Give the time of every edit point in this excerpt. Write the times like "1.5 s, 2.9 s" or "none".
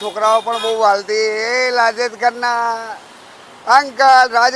none